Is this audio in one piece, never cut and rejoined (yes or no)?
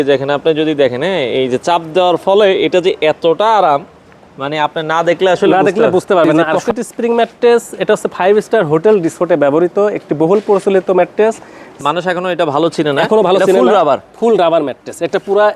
no